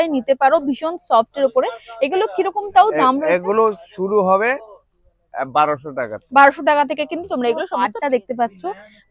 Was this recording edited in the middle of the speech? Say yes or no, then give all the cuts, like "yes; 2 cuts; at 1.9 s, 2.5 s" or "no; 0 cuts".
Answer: yes; 1 cut; at 7.7 s